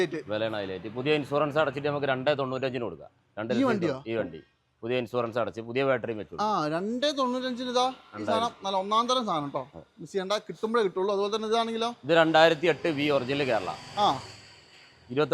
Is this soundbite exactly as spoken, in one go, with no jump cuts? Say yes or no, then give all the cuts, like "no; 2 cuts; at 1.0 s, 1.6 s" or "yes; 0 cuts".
yes; 0 cuts